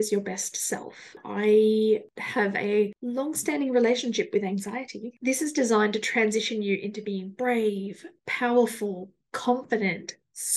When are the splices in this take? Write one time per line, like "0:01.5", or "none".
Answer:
0:01.2
0:05.2